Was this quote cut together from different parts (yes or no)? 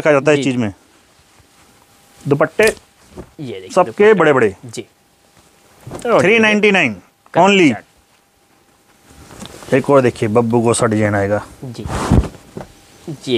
no